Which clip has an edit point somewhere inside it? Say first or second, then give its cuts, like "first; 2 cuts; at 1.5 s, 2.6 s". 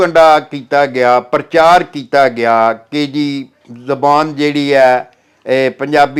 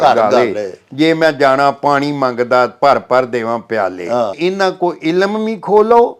second; 1 cut; at 4.4 s